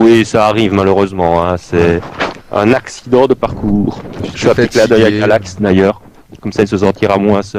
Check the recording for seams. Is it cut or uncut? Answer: uncut